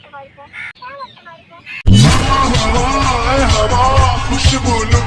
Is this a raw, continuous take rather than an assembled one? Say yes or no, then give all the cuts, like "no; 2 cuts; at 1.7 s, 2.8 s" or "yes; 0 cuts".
yes; 0 cuts